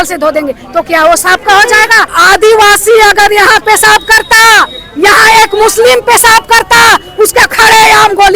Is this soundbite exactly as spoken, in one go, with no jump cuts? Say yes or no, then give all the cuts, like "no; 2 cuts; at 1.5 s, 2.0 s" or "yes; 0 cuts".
no; 1 cut; at 2.1 s